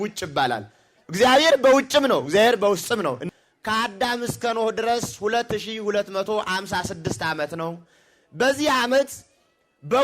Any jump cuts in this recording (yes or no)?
yes